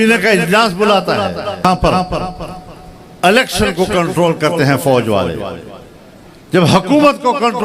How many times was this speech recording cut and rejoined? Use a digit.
1